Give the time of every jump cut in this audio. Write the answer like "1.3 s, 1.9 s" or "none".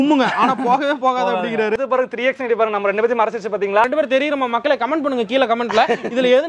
1.8 s, 3.8 s